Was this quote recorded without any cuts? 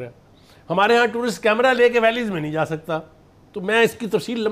yes; 0 cuts

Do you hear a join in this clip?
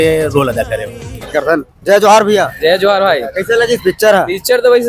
yes; 1 cut; at 1.6 s

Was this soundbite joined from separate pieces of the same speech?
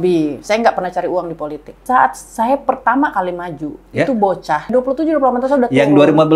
yes; 2 cuts; at 1.8 s, 4.7 s

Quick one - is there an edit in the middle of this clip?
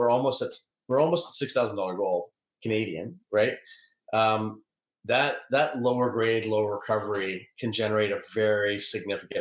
no; 0 cuts

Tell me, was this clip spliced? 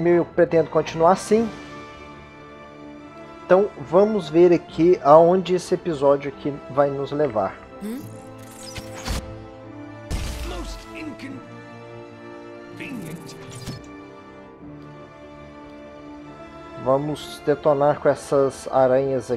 no; 0 cuts

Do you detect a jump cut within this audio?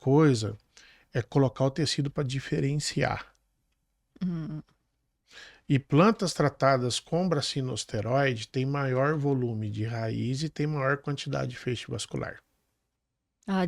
no; 0 cuts

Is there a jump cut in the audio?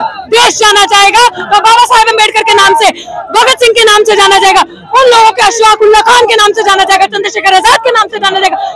no; 0 cuts

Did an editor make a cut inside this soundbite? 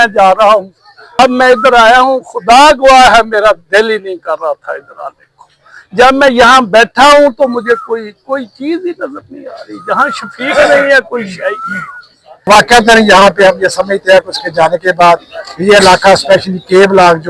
yes; 2 cuts; at 1.2 s, 12.5 s

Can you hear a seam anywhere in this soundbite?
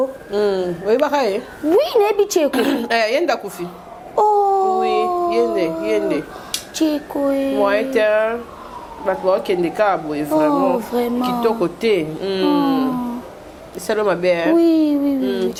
no; 0 cuts

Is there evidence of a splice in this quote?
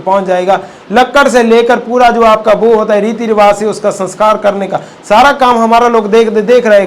no; 0 cuts

